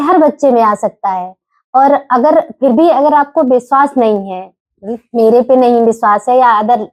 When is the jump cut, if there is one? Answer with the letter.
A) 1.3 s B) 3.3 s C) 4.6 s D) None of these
D